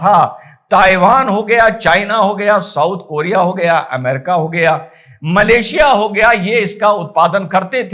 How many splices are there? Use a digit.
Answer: 0